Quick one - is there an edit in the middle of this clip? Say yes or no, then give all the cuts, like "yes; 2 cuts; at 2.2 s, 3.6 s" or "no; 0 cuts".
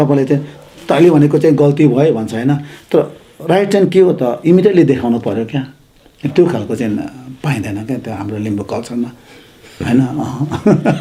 no; 0 cuts